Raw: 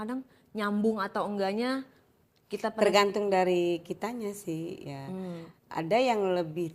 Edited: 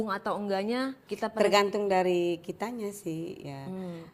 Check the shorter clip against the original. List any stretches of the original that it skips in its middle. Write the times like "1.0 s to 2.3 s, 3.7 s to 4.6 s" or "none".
1.9 s to 2.4 s